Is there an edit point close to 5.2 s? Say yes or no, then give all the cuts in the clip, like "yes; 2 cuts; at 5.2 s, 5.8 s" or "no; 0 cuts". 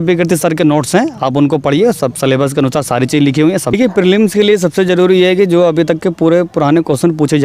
no; 1 cut; at 3.7 s